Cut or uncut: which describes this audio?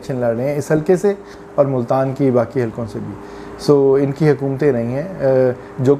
uncut